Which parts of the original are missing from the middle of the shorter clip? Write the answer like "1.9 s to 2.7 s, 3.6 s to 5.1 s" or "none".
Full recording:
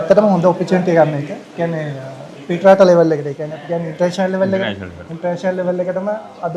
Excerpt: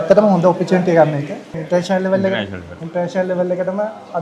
1.5 s to 3.8 s

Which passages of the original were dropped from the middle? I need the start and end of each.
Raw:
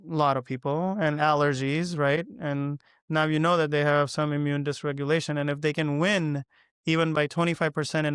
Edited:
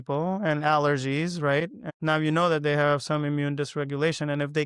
2.4 s to 2.9 s

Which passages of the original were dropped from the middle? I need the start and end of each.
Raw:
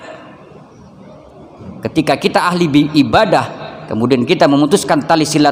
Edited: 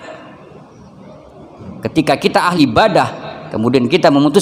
2.5 s to 2.9 s

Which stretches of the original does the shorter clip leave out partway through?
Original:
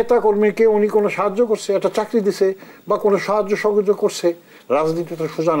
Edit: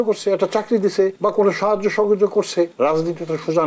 2.6 s to 2.8 s, 4.4 s to 4.6 s

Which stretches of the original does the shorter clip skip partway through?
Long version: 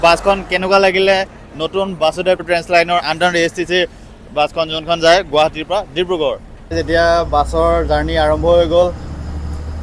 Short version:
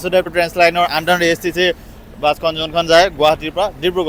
none

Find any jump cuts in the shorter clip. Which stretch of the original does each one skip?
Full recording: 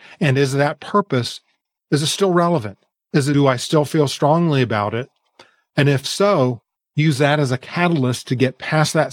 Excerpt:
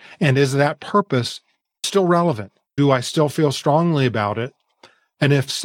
1.8 s to 2.1 s, 3.0 s to 3.3 s

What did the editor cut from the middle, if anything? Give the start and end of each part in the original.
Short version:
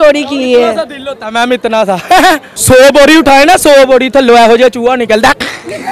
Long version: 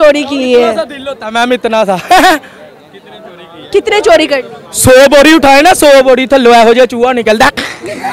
2.5 s to 4.7 s

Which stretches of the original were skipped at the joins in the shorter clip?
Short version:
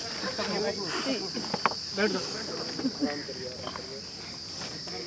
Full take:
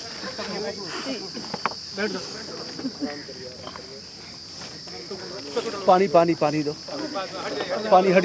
none

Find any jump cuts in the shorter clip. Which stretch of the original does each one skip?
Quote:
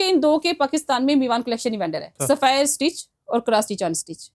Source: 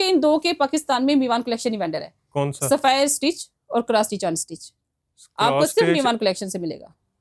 2.1 s to 2.6 s

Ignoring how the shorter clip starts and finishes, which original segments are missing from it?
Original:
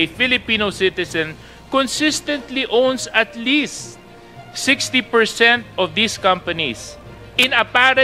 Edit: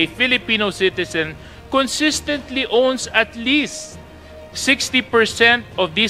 none

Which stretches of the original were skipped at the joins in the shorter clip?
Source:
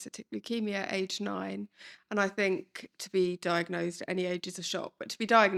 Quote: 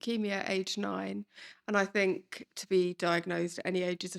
none

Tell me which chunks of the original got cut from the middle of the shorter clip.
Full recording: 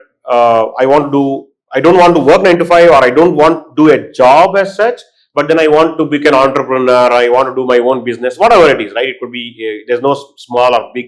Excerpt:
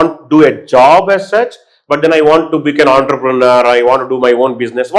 none

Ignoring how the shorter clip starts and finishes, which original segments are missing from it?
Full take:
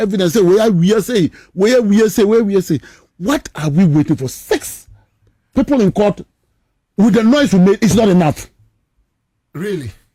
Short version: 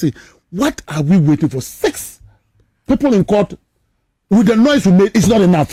none

